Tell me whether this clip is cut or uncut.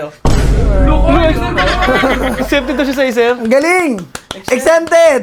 uncut